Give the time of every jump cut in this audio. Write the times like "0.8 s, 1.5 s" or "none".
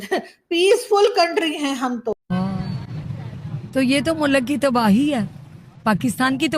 2.4 s

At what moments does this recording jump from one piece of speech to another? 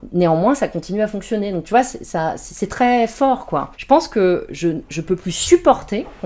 3.7 s

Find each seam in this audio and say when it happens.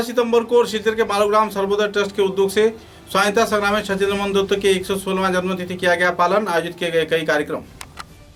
none

